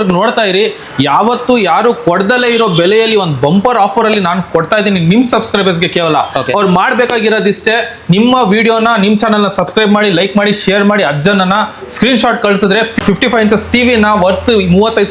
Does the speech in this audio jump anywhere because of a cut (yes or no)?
no